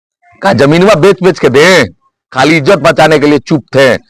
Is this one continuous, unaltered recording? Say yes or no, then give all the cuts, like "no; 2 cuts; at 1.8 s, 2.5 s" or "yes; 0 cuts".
yes; 0 cuts